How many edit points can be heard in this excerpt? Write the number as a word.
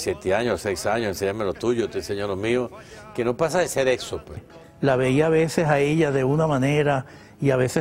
one